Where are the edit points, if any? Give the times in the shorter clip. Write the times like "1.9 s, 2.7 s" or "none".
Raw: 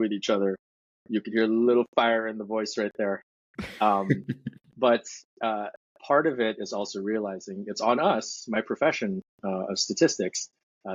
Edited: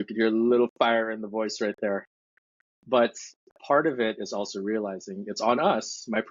2.4 s, 3.4 s